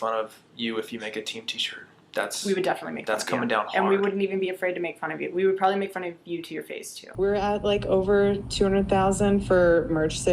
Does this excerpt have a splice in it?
yes; 1 cut; at 7.0 s

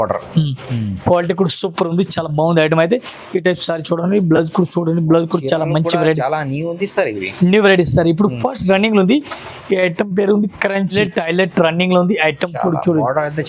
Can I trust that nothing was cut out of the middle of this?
no; 1 cut; at 10.9 s

